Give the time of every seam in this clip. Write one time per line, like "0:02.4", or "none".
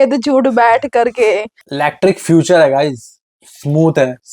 0:01.6